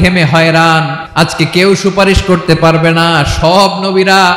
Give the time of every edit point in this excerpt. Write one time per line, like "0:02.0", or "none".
0:01.0